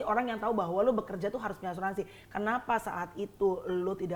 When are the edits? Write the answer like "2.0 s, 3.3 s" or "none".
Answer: none